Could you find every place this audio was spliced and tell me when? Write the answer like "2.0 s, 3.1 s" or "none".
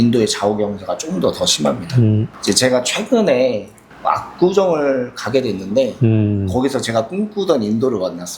2.3 s